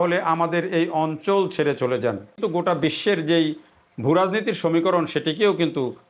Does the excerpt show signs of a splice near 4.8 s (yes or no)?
no